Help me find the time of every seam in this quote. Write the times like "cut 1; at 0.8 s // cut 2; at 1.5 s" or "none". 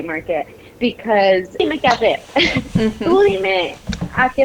cut 1; at 1.6 s